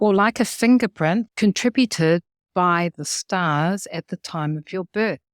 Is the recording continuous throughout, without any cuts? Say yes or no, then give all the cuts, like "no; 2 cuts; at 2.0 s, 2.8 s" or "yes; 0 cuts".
no; 2 cuts; at 1.3 s, 2.4 s